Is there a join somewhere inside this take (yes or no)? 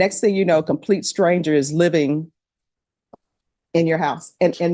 no